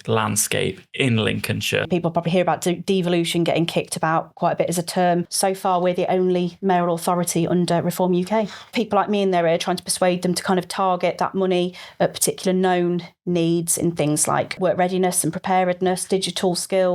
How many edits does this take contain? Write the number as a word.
four